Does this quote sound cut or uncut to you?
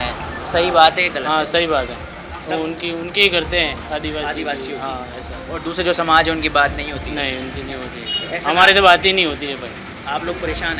uncut